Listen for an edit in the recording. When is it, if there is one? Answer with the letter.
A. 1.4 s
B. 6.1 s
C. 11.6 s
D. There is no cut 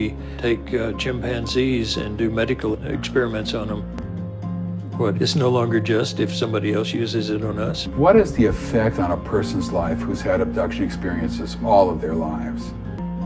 C